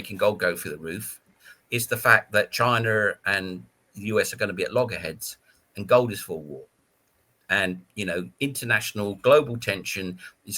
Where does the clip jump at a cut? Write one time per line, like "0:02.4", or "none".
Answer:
none

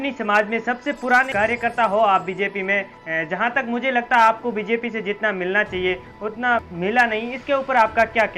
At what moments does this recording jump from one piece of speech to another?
0:01.3
0:06.7

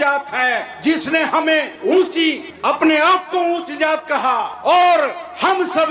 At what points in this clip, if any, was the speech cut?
none

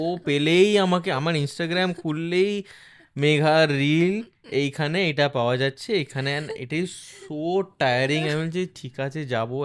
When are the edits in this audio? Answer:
none

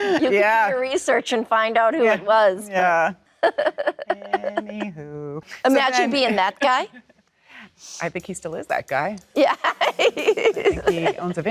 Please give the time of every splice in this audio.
0:03.3
0:05.5

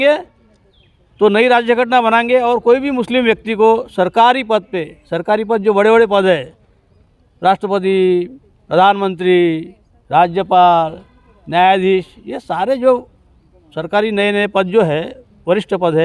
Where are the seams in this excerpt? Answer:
none

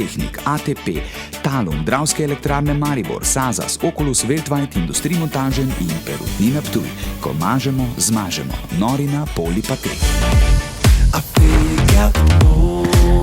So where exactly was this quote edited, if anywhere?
0:10.1

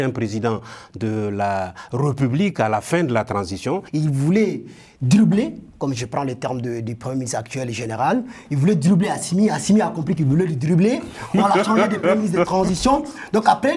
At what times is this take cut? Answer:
0:03.9

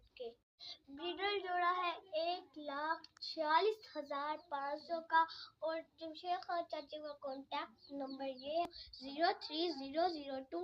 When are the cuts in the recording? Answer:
0:08.7

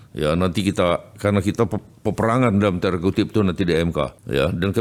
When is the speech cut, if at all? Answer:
none

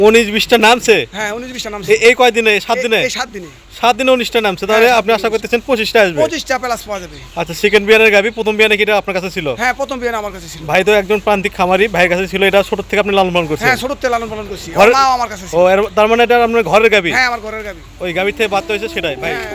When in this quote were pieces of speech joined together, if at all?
none

